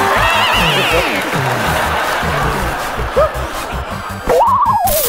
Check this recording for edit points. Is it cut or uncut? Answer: uncut